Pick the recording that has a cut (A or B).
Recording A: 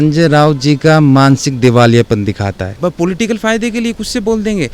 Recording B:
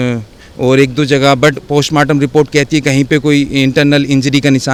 A